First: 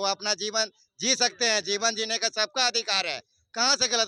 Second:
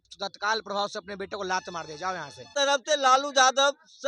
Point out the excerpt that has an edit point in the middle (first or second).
second